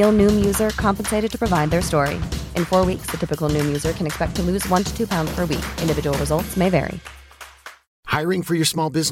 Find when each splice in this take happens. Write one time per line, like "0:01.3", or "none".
0:07.8